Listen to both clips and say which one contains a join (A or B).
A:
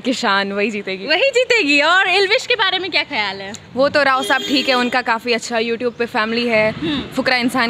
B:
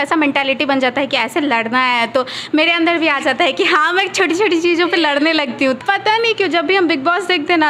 B